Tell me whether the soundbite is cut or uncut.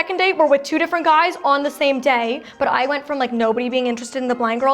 cut